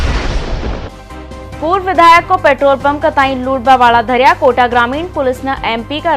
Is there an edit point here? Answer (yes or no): yes